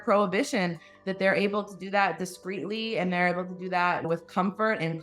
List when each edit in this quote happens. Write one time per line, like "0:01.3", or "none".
0:04.1